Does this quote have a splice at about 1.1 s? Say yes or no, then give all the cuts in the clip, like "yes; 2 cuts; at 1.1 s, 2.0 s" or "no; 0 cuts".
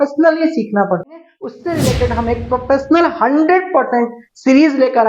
yes; 1 cut; at 1.1 s